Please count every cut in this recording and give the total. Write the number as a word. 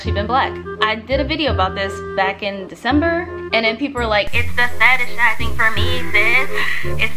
zero